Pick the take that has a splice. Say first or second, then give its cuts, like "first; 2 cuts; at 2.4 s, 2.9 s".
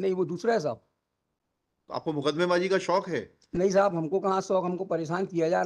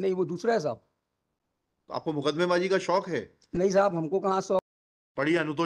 second; 1 cut; at 4.6 s